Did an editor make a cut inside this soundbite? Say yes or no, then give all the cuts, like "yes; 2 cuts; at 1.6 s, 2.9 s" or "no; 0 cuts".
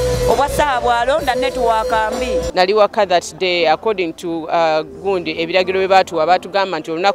yes; 1 cut; at 2.5 s